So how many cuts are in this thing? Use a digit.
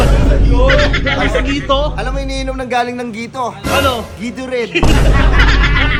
0